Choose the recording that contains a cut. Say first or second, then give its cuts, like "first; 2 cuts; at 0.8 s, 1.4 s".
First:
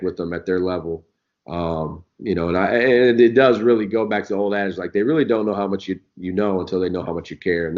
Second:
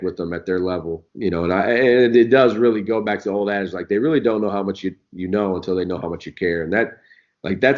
second; 1 cut; at 1.1 s